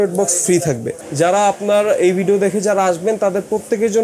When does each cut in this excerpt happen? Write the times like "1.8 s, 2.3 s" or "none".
1.0 s